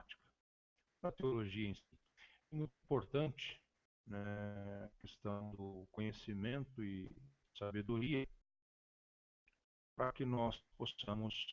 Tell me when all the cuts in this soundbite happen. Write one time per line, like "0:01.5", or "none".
0:05.5